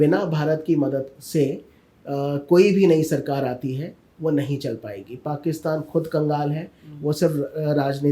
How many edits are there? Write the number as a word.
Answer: one